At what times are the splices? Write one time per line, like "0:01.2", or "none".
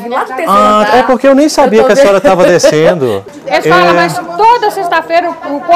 0:03.2